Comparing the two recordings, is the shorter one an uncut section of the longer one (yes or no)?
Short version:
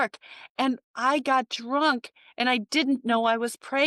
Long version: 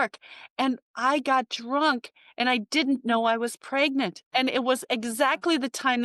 yes